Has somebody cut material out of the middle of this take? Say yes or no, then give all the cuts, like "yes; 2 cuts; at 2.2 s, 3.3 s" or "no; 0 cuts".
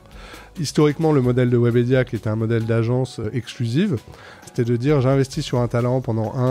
yes; 2 cuts; at 3.2 s, 4.5 s